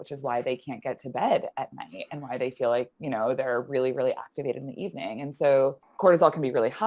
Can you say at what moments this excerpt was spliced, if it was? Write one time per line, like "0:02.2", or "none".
0:05.9